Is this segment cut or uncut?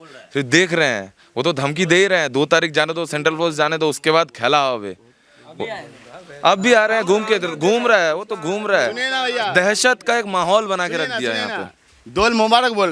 uncut